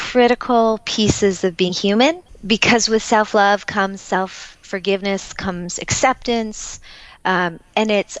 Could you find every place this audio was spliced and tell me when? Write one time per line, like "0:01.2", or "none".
0:02.3